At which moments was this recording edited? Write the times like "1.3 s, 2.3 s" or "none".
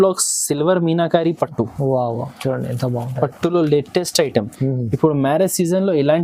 none